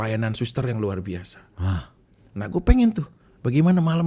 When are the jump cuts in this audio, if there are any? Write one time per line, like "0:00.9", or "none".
none